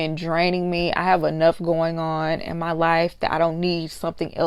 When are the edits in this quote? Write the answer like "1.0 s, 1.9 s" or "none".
none